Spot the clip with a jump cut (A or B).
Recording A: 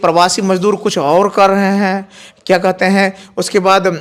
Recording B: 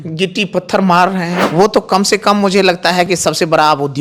B